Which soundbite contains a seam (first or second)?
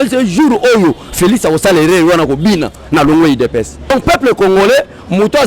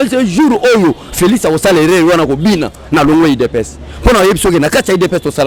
first